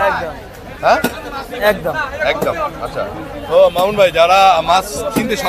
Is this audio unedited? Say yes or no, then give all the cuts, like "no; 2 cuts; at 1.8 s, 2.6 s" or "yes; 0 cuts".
yes; 0 cuts